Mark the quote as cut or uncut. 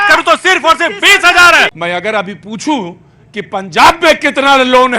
cut